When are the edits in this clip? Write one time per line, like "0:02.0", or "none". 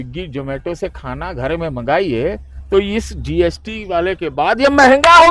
none